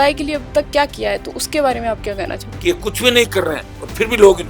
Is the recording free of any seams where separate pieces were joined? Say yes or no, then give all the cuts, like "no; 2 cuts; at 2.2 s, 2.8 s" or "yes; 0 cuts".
no; 1 cut; at 2.5 s